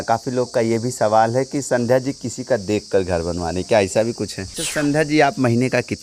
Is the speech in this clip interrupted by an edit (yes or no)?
yes